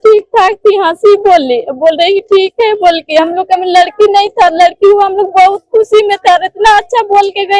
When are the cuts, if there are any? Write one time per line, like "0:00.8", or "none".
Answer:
none